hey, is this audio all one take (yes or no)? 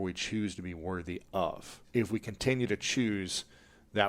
no